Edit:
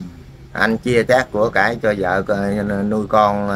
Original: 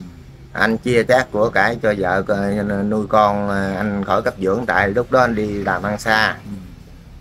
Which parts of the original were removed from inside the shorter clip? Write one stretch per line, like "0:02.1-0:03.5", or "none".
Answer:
none